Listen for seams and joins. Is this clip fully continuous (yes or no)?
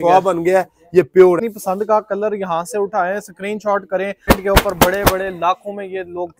no